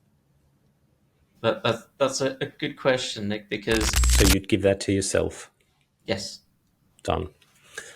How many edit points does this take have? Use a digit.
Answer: 1